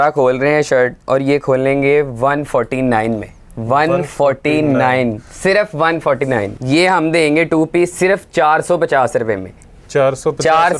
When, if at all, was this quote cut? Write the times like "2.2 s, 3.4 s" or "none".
6.6 s